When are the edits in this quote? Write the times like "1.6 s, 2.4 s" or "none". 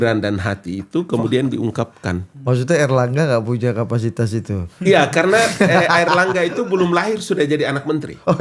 none